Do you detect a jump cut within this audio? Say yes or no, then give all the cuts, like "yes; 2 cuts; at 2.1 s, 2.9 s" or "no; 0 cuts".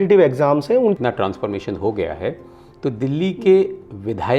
yes; 1 cut; at 1.0 s